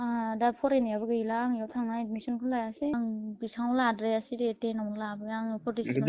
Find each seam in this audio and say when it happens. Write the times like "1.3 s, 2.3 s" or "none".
2.9 s